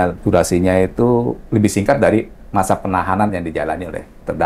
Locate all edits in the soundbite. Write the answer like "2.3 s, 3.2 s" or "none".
none